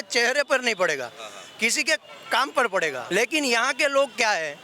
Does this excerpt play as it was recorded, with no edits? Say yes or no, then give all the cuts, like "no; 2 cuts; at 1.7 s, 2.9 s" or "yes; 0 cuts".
no; 1 cut; at 3.0 s